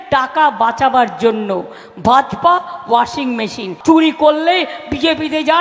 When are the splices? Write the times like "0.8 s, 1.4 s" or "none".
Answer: 3.7 s